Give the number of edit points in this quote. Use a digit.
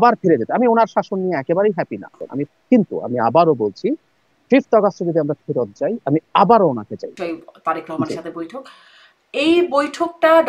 2